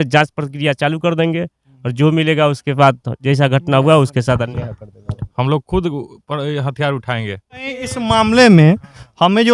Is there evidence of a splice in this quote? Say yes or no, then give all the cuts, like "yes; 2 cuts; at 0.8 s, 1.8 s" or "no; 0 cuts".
yes; 1 cut; at 7.6 s